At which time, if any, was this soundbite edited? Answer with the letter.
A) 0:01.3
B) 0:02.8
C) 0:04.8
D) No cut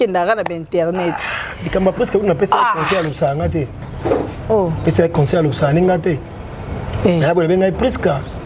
C